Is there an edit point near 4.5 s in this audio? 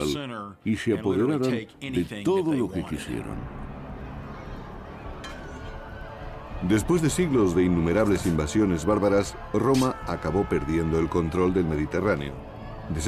no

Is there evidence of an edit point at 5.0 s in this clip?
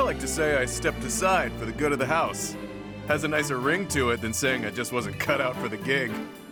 no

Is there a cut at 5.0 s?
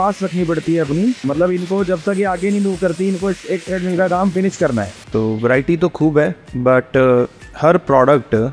yes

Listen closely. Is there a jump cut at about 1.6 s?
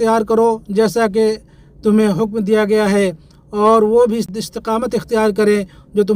no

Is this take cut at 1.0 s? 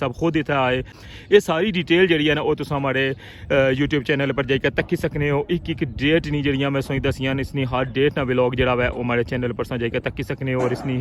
yes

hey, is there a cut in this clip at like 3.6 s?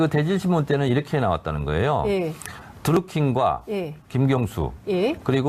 yes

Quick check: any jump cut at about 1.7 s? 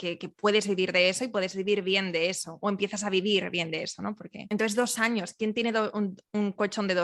no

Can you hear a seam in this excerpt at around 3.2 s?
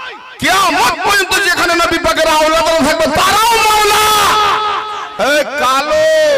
no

